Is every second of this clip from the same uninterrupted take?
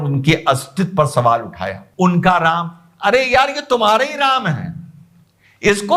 no; 1 cut; at 1.7 s

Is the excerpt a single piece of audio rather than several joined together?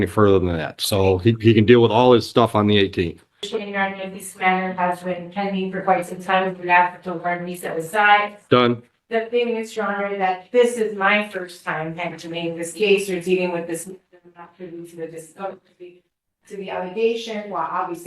no; 1 cut; at 3.5 s

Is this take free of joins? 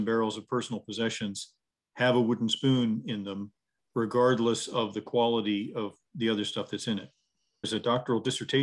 no; 1 cut; at 7.7 s

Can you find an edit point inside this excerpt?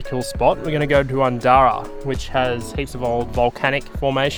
no; 0 cuts

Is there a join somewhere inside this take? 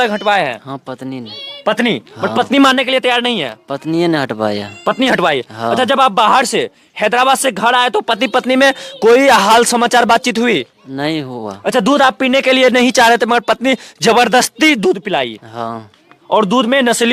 no; 0 cuts

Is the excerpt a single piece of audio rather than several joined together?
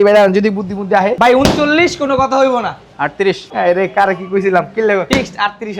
no; 3 cuts; at 1.1 s, 3.5 s, 5.1 s

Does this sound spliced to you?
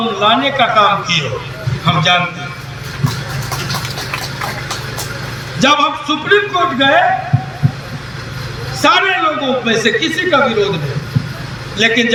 no; 0 cuts

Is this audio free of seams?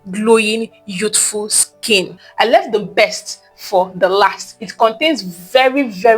no; 1 cut; at 2.3 s

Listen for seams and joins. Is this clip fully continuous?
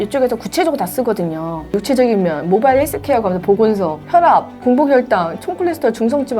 no; 2 cuts; at 1.8 s, 4.3 s

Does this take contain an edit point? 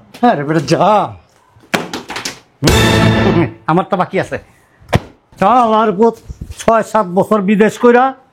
no; 0 cuts

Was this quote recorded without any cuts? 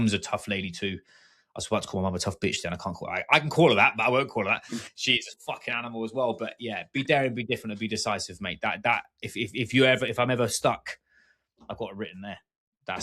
yes; 0 cuts

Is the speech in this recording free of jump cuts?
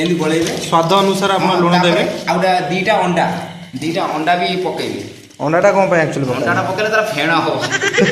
yes; 0 cuts

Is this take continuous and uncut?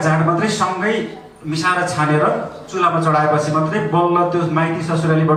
yes; 0 cuts

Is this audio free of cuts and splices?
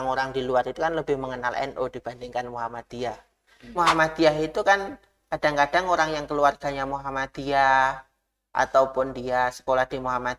no; 1 cut; at 3.8 s

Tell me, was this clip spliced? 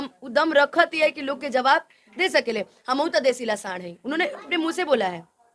no; 0 cuts

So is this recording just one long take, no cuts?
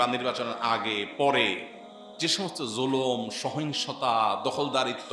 yes; 0 cuts

